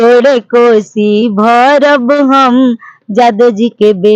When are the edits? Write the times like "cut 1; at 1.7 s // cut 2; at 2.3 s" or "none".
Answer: none